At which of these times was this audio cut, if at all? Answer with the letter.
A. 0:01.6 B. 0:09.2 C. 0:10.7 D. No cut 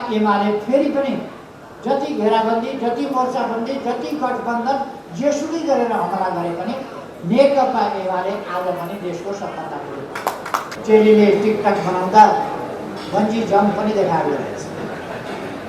C